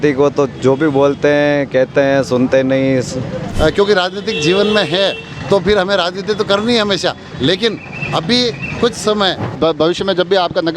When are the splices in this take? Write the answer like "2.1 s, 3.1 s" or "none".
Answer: 3.4 s, 9.5 s

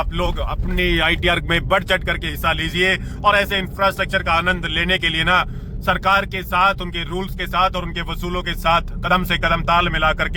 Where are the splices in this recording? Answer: none

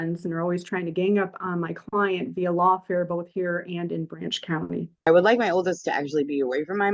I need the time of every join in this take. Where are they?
5.1 s

